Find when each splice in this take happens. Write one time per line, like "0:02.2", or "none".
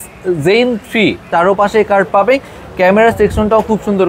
0:01.2